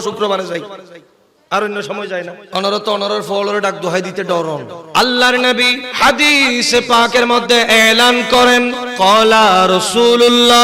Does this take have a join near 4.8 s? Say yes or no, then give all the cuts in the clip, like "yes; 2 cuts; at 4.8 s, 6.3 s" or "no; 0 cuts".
yes; 4 cuts; at 2.4 s, 4.8 s, 5.8 s, 8.8 s